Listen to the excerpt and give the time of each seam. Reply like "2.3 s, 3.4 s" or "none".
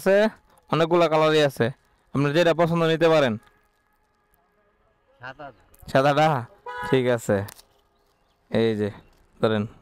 none